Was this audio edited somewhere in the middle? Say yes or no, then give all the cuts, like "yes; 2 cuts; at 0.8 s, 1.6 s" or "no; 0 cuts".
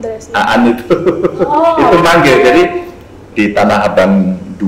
no; 0 cuts